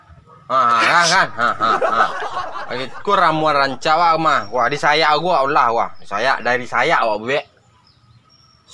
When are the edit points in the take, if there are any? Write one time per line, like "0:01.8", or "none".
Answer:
none